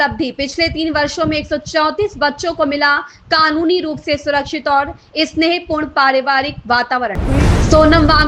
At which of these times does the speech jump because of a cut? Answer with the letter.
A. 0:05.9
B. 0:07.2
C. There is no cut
B